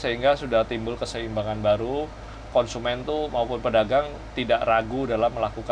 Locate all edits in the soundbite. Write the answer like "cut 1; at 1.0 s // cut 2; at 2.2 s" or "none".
cut 1; at 2.5 s